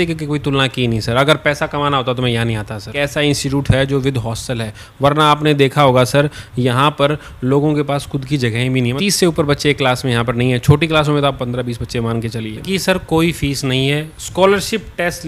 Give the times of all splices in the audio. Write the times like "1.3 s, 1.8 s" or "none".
2.9 s, 8.9 s, 12.6 s